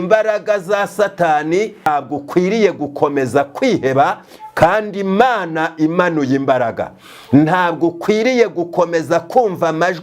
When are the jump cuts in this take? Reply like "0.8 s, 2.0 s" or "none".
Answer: 1.9 s